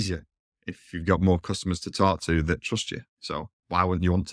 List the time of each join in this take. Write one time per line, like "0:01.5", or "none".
0:03.1

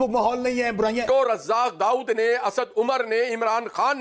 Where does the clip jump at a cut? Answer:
0:01.0

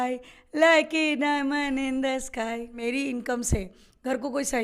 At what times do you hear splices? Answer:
0:02.8

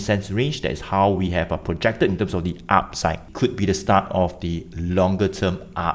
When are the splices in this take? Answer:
0:03.3

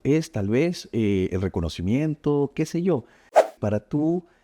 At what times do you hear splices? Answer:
0:03.5

